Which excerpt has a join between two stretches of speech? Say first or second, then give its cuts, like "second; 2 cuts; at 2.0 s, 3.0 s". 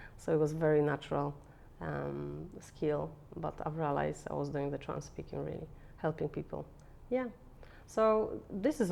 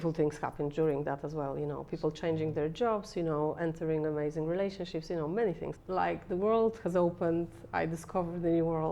second; 1 cut; at 5.7 s